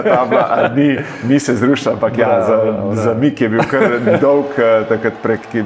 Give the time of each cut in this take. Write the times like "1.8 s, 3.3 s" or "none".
none